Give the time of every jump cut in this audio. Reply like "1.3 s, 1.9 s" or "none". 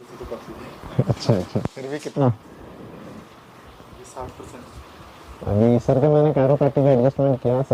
none

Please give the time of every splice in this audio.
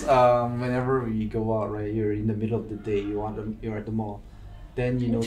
none

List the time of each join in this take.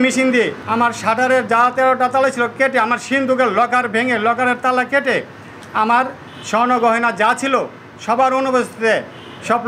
none

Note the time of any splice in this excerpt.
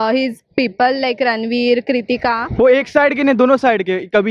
2.4 s

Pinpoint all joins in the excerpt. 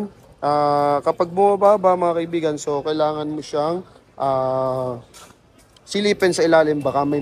none

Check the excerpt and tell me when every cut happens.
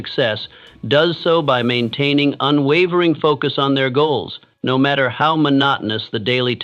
none

